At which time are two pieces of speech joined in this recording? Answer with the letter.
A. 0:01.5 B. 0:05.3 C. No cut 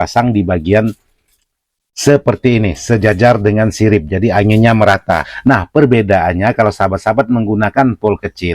B